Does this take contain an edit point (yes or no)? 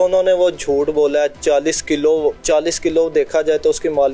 yes